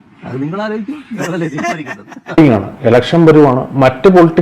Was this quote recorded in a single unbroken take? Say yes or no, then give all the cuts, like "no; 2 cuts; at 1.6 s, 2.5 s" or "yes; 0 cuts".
no; 1 cut; at 2.4 s